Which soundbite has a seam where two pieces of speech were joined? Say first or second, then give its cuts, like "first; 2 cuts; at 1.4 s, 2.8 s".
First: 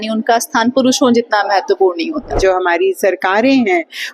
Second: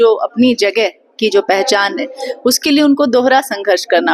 first; 1 cut; at 2.4 s